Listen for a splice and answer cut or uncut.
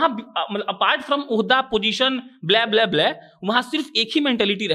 uncut